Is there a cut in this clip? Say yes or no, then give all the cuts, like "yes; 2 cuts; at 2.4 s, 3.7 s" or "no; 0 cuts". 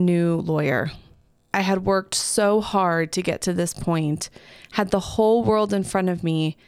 no; 0 cuts